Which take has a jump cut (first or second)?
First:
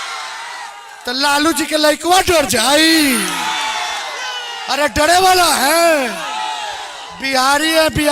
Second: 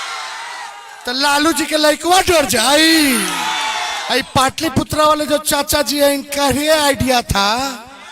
second